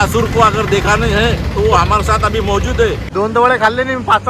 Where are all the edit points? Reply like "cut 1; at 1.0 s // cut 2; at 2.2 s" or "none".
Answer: cut 1; at 3.0 s